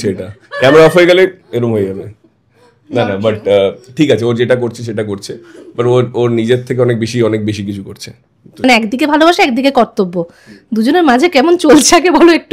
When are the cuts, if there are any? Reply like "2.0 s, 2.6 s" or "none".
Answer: 8.6 s